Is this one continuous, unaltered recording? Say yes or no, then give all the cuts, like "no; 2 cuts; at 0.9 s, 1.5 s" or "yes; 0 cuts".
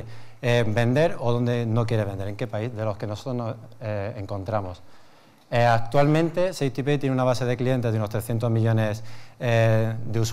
yes; 0 cuts